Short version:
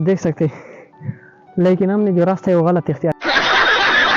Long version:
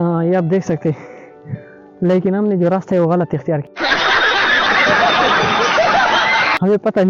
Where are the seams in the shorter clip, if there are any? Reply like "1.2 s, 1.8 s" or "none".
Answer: 3.2 s